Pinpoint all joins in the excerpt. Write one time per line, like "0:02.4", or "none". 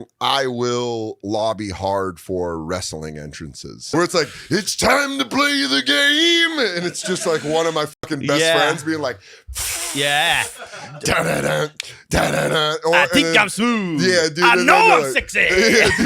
0:03.9